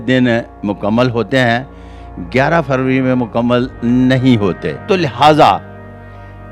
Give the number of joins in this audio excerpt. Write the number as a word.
one